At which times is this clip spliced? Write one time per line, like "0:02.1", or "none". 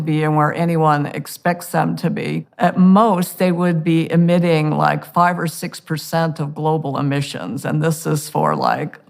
0:02.5